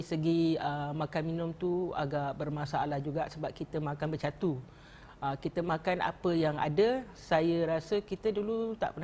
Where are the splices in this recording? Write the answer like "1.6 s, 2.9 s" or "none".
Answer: none